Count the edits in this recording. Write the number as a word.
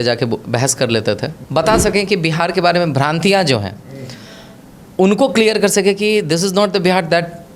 one